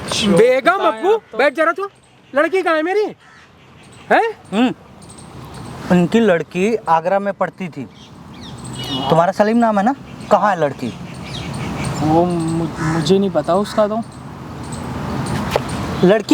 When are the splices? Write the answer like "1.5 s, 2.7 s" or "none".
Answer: none